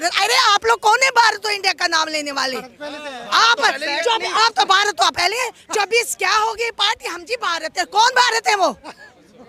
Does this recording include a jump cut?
no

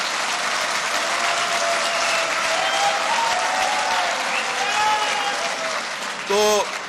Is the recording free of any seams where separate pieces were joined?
yes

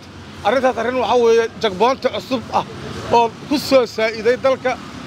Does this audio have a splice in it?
no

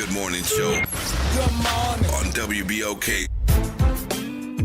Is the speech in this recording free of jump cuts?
no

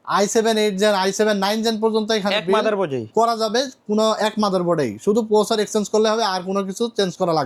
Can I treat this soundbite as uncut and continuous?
yes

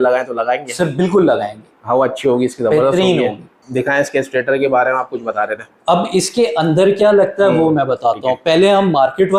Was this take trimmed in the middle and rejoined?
no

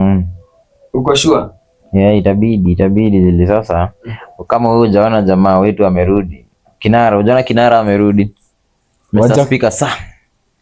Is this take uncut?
yes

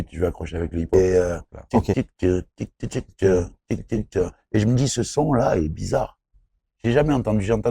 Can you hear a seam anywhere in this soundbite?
yes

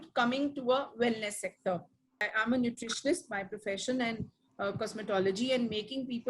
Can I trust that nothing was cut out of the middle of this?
no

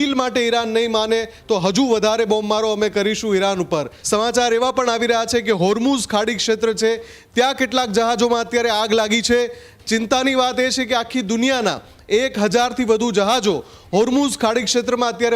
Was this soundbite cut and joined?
yes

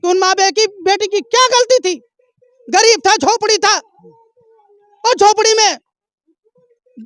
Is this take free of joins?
yes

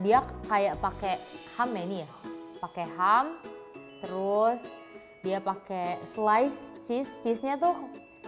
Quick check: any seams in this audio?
no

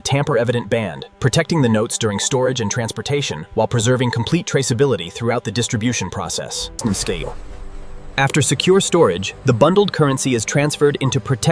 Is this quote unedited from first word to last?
no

